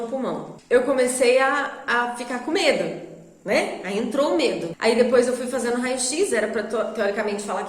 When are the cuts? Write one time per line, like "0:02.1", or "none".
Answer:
0:04.7